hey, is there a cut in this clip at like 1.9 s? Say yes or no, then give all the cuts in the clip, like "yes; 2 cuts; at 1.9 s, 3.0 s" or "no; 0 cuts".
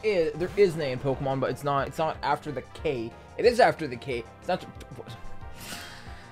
yes; 1 cut; at 1.9 s